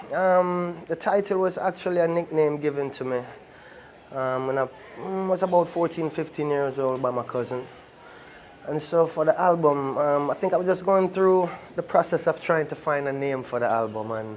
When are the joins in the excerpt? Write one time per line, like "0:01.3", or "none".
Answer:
0:12.0